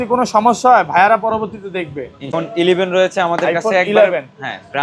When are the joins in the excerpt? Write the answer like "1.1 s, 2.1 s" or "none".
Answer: 2.3 s